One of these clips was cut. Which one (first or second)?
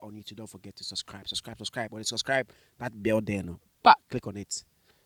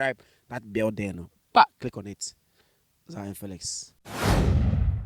second